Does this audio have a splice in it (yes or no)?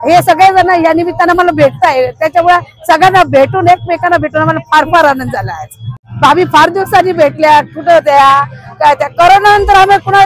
yes